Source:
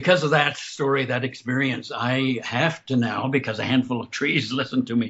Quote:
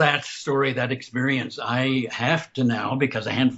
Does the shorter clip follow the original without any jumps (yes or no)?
yes